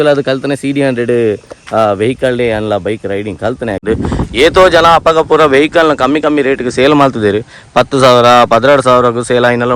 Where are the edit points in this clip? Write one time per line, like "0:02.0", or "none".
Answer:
0:03.8